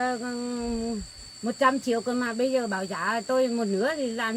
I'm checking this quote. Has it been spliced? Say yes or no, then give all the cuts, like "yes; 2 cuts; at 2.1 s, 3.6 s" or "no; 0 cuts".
no; 0 cuts